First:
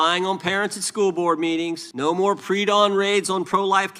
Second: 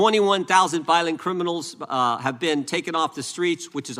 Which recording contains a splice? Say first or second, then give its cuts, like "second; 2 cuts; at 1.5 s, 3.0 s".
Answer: first; 1 cut; at 1.8 s